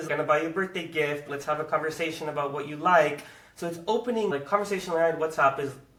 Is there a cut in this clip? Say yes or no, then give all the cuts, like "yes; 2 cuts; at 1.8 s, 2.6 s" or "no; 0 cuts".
no; 0 cuts